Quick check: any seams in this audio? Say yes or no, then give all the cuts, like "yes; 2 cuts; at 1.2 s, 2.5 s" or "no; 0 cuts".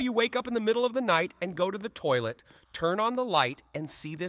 no; 0 cuts